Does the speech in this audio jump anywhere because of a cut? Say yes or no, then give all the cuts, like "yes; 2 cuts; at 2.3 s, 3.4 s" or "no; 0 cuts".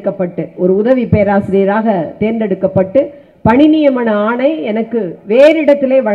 no; 0 cuts